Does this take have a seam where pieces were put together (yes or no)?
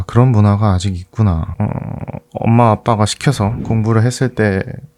yes